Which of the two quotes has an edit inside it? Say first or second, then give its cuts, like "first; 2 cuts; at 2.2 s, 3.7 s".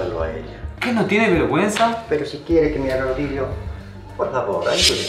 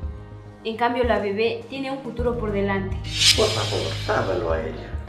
second; 1 cut; at 3.2 s